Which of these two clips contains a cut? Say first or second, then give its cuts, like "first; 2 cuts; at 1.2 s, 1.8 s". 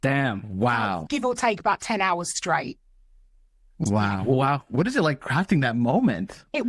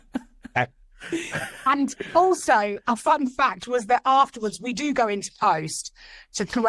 first; 1 cut; at 1.1 s